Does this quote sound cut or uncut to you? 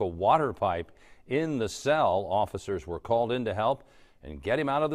uncut